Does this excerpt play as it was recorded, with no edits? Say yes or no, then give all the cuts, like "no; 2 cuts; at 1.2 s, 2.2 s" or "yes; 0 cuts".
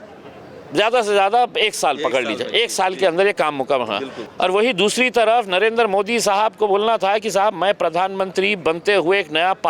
no; 1 cut; at 4.2 s